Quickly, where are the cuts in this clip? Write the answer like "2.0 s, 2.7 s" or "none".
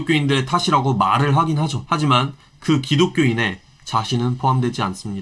1.8 s

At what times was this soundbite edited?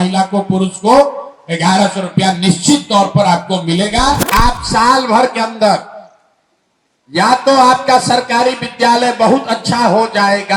4.2 s

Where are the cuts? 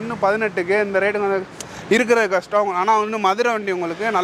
none

